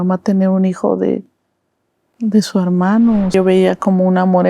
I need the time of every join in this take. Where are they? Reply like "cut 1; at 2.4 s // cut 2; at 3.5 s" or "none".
cut 1; at 3.3 s